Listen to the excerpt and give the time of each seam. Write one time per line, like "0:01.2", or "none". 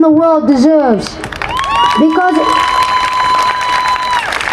none